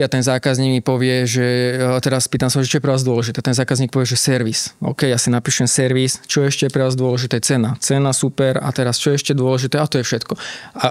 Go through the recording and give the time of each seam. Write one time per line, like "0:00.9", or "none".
none